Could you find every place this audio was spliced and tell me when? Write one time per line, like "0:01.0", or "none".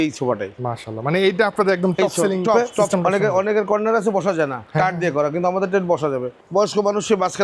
0:02.7
0:06.4